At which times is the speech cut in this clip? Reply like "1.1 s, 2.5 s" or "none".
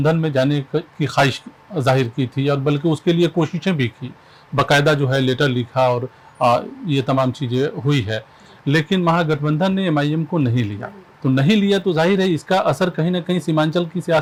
none